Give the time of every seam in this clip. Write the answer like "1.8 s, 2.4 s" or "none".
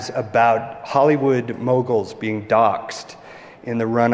none